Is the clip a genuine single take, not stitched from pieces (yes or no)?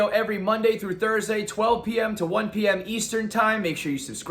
yes